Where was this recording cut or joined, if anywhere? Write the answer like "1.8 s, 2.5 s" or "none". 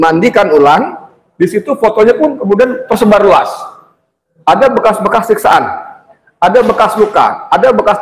none